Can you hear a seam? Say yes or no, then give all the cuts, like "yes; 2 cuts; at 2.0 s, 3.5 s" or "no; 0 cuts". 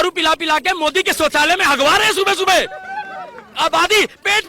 no; 0 cuts